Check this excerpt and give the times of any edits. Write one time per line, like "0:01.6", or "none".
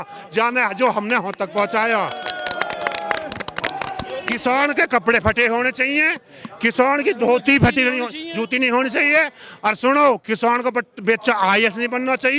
0:04.3

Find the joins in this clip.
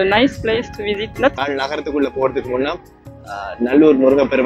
0:01.4

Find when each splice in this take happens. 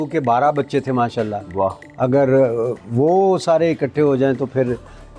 none

